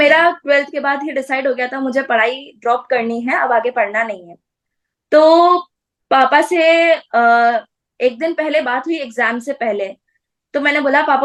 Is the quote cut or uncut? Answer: uncut